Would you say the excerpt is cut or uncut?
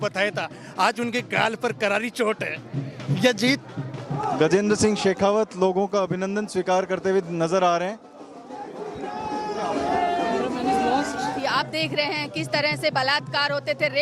cut